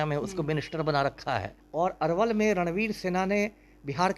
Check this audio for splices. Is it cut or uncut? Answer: cut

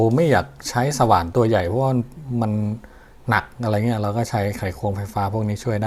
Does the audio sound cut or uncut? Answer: uncut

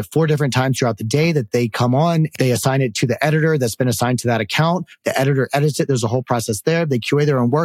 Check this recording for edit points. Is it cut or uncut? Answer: cut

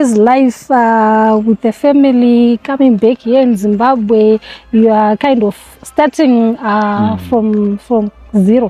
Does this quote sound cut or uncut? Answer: uncut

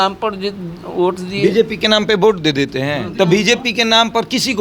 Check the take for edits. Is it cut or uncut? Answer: cut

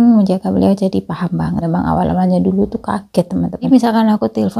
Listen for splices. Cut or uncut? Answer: cut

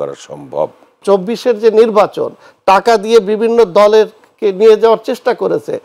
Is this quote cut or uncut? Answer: cut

